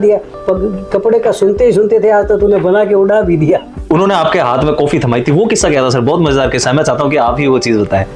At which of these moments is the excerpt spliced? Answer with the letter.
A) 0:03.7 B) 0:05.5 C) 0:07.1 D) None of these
A